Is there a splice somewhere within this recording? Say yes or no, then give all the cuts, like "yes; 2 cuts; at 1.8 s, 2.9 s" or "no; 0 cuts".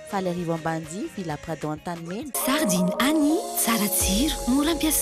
yes; 1 cut; at 2.3 s